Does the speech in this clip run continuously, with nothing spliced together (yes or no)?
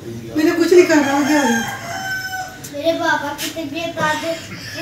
no